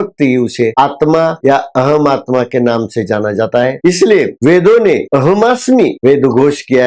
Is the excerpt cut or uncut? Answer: cut